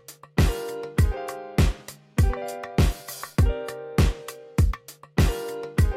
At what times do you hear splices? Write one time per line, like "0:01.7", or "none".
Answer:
0:03.7